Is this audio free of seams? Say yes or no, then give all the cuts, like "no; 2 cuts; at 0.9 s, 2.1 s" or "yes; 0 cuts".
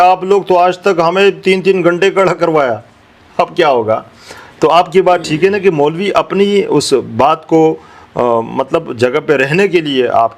yes; 0 cuts